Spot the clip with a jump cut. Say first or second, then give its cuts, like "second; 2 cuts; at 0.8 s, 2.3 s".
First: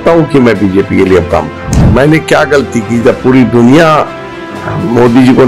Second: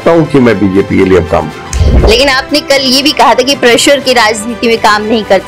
first; 1 cut; at 1.8 s